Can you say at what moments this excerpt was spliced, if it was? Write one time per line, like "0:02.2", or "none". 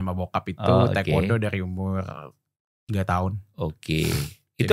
none

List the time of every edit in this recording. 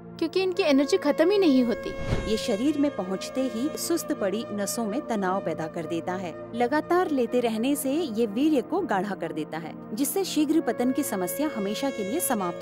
0:02.1

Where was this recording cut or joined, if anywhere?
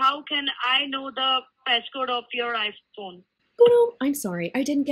none

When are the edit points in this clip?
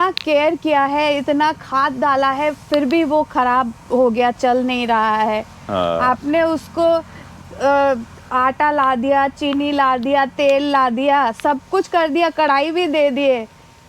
none

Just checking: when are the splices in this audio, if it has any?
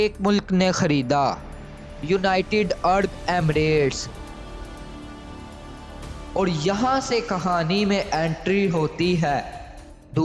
none

